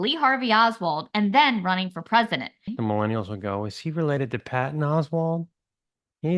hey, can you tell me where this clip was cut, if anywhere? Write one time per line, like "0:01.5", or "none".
0:02.6